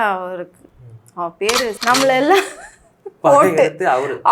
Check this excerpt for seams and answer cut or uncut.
cut